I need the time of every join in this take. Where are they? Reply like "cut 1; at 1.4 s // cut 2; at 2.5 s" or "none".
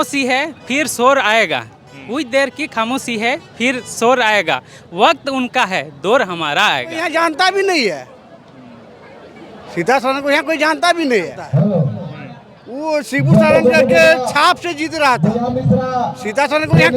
cut 1; at 7.0 s // cut 2; at 11.4 s